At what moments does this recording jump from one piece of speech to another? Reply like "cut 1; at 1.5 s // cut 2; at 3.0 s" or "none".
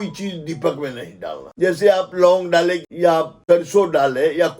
cut 1; at 1.4 s // cut 2; at 2.9 s